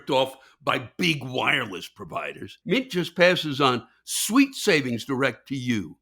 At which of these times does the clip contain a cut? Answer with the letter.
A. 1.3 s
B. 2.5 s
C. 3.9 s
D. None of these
B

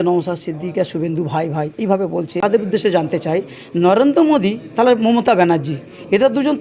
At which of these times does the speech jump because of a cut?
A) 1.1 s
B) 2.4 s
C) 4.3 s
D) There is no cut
B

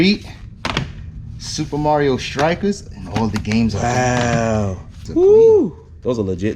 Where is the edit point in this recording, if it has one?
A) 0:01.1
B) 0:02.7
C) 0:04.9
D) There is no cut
C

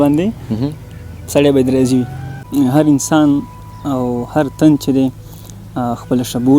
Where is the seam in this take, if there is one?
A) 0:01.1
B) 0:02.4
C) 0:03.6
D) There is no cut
B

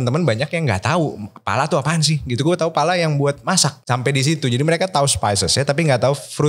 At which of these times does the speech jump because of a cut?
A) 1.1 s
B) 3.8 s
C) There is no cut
B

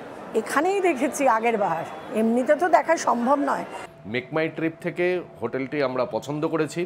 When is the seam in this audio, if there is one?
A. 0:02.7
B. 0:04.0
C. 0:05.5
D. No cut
B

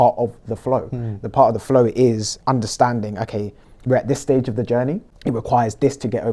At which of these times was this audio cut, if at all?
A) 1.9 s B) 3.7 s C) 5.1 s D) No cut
C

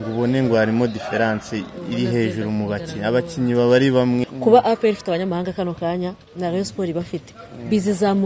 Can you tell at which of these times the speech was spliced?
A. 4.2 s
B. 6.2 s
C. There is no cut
A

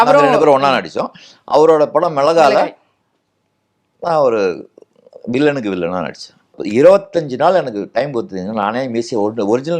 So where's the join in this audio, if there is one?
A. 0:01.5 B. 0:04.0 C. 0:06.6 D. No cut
C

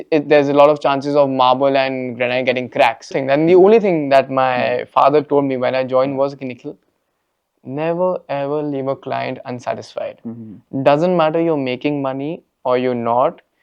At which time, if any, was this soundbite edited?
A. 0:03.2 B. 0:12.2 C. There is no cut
A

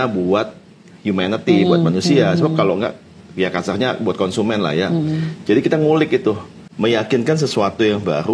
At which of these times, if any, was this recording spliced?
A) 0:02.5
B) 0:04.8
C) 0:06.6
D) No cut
C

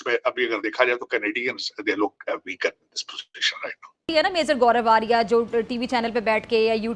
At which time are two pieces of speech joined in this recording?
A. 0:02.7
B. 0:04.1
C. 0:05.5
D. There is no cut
B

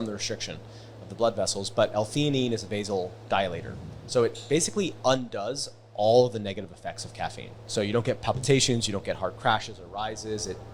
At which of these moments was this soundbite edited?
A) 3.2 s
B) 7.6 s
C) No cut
B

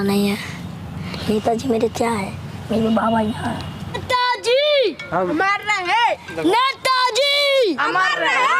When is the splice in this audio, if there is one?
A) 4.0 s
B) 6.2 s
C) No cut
A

